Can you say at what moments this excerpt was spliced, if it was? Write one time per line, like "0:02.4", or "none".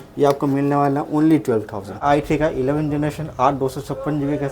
0:02.0